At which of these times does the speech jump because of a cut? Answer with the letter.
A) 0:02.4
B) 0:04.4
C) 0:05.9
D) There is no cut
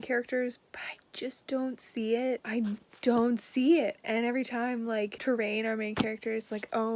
D